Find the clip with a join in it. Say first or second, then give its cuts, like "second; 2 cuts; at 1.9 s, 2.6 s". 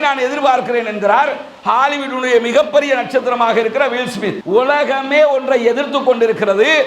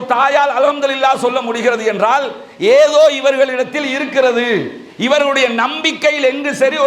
first; 1 cut; at 4.4 s